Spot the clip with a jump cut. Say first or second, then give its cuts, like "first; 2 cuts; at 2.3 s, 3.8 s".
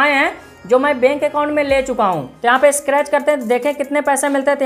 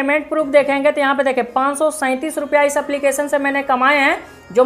first; 1 cut; at 2.3 s